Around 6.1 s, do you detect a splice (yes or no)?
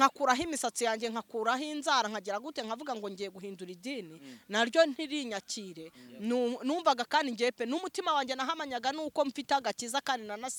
no